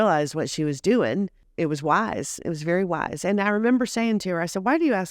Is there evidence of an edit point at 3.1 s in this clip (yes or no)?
no